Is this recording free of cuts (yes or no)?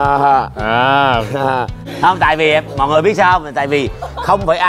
yes